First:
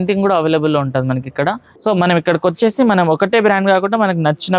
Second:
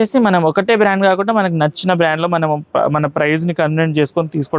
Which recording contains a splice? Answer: first; 1 cut; at 1.7 s

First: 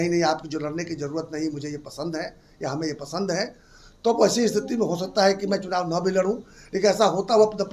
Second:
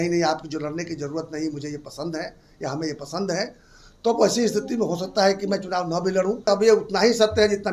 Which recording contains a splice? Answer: second; 1 cut; at 6.5 s

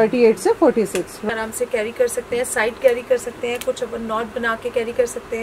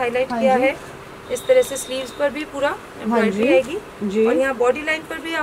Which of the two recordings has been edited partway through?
first; 1 cut; at 1.3 s

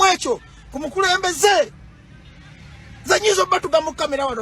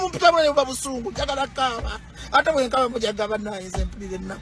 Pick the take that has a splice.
first; 1 cut; at 1.7 s

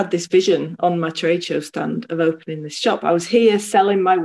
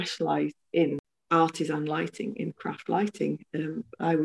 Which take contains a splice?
second; 1 cut; at 1.1 s

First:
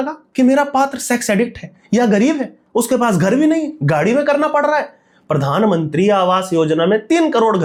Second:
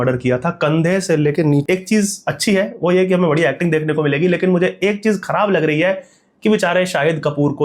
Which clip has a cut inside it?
second; 1 cut; at 1.6 s

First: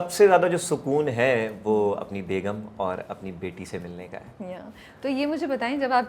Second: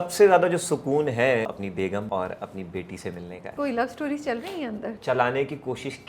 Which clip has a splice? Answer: second; 3 cuts; at 1.7 s, 3.5 s, 4.9 s

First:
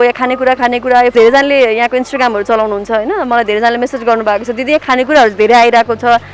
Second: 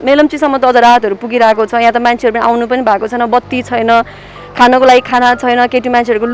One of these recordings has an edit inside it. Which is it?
first; 1 cut; at 1.1 s

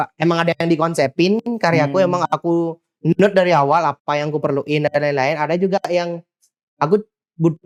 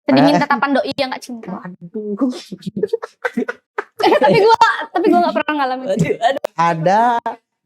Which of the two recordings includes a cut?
second; 1 cut; at 6.4 s

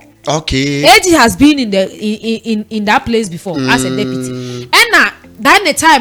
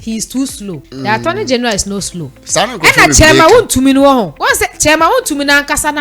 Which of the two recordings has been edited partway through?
second; 2 cuts; at 0.9 s, 4.4 s

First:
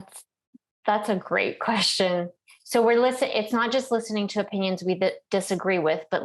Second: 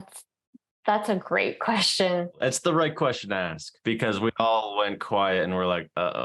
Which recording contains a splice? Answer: second; 1 cut; at 2.4 s

